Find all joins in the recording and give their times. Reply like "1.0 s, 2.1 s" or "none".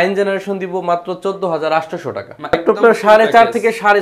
2.5 s